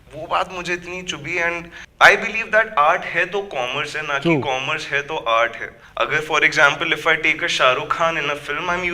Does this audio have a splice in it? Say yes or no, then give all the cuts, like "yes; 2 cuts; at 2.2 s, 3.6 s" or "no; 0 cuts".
no; 0 cuts